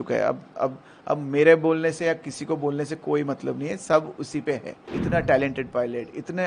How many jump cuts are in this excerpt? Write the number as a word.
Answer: one